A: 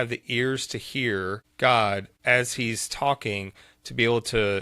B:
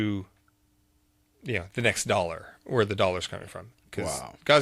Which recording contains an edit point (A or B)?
A